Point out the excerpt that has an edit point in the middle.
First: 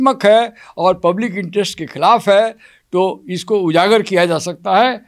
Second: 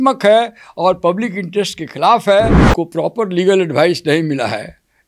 second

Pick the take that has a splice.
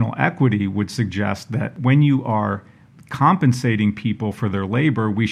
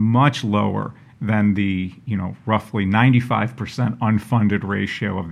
first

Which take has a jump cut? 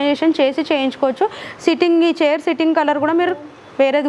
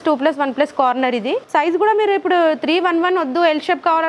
second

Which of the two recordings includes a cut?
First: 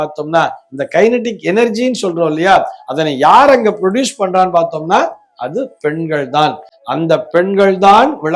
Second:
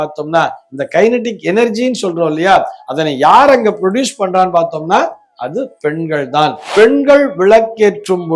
second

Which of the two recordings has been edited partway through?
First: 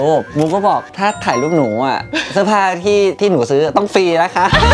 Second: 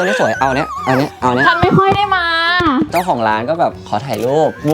second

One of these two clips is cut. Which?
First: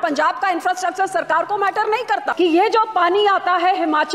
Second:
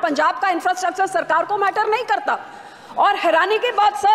first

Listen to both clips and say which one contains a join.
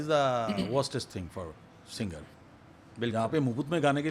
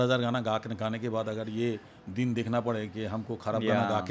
first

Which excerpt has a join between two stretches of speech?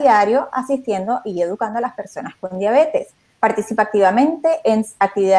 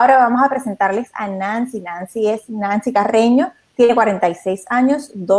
second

